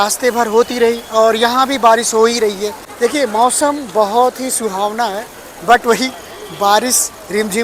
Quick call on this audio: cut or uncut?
uncut